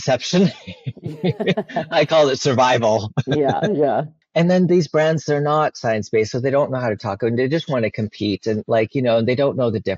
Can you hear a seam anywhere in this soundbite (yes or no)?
no